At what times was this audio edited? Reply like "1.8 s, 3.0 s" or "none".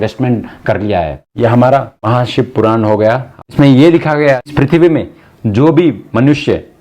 1.2 s, 1.9 s, 3.4 s, 4.5 s